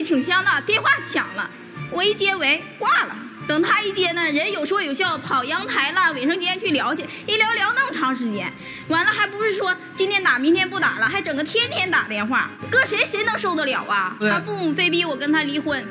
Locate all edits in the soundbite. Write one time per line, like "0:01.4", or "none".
0:12.5
0:14.2